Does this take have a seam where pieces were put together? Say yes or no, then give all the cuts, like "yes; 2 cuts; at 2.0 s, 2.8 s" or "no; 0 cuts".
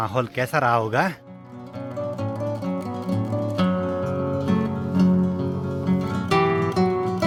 no; 0 cuts